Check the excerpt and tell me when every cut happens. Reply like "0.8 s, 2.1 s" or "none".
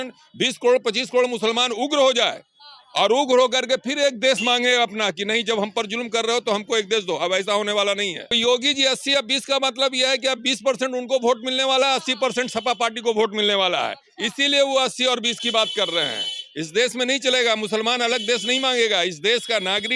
8.4 s